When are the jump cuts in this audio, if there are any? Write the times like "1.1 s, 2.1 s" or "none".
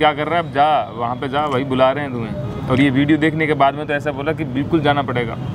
none